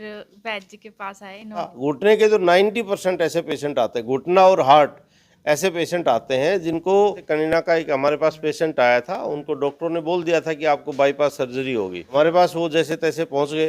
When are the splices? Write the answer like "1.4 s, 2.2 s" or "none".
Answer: 1.7 s, 7.5 s, 12.1 s